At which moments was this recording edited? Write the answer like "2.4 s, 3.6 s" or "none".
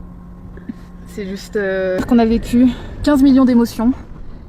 2.0 s